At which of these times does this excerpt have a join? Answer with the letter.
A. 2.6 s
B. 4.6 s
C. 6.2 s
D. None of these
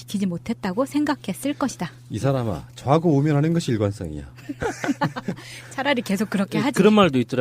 B